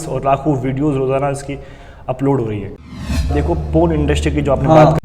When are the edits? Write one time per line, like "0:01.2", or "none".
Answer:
0:03.3